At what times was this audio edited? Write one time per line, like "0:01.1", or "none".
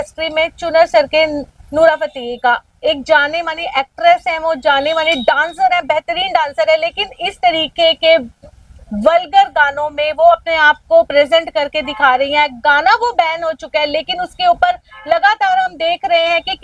none